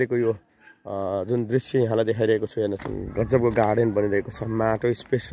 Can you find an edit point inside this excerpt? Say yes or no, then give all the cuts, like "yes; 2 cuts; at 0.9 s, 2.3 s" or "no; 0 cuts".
yes; 1 cut; at 2.9 s